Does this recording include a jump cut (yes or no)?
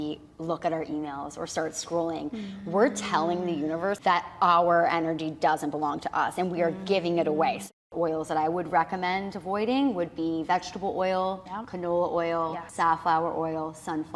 yes